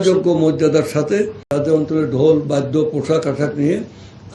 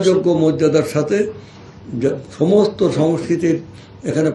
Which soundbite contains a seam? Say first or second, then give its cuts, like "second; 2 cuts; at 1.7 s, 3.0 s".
first; 1 cut; at 1.5 s